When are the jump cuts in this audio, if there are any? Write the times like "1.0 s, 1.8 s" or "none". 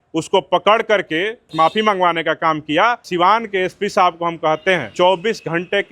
1.5 s, 3.0 s, 4.9 s